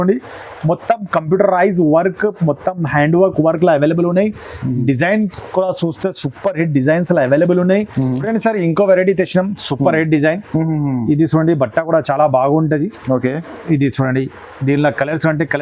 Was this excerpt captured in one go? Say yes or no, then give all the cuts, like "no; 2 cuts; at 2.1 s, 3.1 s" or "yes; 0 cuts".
no; 1 cut; at 8.2 s